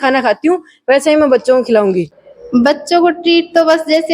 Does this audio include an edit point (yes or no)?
yes